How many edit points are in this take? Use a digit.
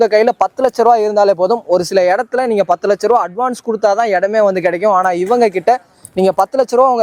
0